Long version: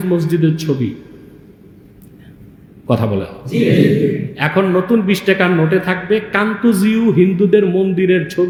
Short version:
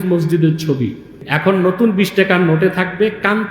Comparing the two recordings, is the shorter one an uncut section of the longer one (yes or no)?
no